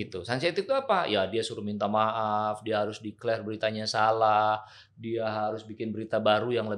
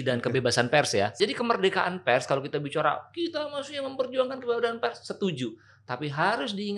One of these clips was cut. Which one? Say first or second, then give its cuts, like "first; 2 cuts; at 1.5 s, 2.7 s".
second; 1 cut; at 1.2 s